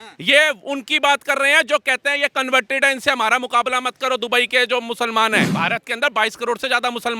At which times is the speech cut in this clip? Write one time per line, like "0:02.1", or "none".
0:05.5